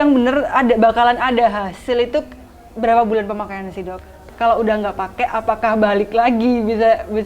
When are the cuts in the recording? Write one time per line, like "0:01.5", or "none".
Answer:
0:04.2